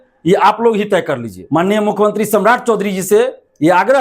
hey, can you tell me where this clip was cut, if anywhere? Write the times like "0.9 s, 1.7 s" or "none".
1.3 s

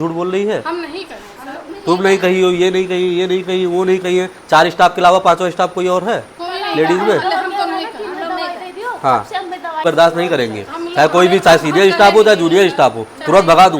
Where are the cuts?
9.8 s

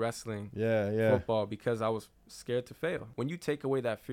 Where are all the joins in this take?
3.1 s

